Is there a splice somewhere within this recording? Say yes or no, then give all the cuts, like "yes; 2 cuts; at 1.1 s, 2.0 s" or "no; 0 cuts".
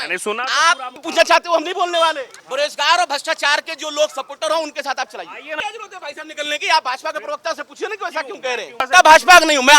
yes; 4 cuts; at 1.0 s, 2.3 s, 5.5 s, 8.8 s